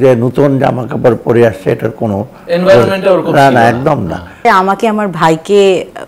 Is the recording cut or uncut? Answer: cut